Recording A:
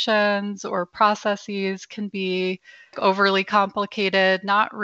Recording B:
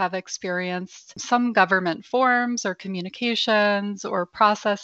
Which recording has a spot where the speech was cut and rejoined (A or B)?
B